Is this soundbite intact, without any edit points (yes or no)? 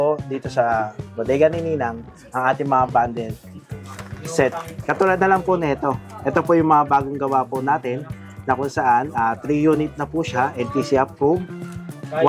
yes